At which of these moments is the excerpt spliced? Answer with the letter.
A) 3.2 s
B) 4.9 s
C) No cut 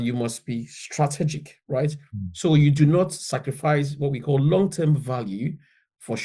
C